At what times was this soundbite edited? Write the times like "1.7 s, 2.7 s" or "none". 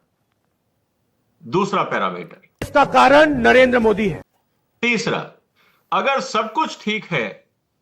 none